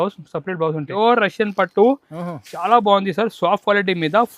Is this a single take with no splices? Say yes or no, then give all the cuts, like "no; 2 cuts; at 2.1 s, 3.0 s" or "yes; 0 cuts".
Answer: no; 1 cut; at 0.9 s